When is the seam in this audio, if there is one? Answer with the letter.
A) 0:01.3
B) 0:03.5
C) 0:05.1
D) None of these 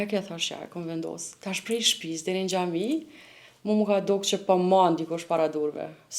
A